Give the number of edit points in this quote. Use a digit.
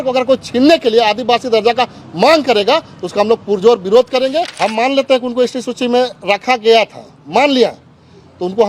1